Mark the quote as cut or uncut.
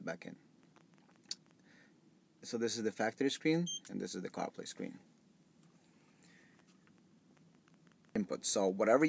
cut